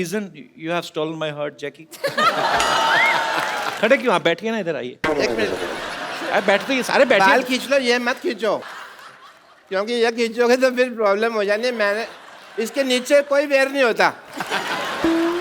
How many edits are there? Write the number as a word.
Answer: two